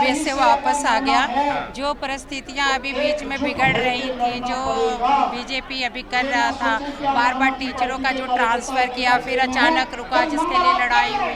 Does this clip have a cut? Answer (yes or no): no